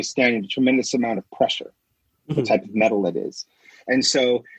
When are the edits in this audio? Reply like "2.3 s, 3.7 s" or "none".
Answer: none